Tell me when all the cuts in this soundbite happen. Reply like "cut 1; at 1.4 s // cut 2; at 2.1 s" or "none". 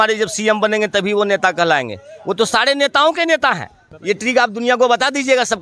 cut 1; at 3.9 s